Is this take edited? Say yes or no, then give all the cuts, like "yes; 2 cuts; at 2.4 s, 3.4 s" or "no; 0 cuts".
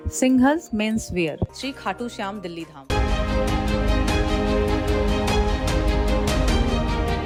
no; 0 cuts